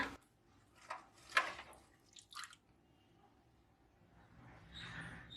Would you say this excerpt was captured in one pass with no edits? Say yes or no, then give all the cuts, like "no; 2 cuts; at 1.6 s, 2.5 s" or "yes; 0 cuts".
no; 1 cut; at 2.5 s